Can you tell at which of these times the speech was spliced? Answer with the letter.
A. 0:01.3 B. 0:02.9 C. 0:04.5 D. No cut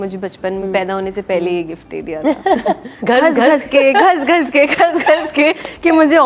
B